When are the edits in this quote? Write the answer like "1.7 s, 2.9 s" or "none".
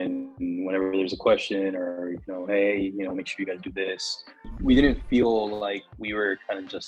4.5 s